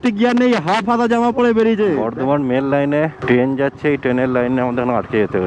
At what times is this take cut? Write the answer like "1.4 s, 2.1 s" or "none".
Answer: 2.1 s, 3.2 s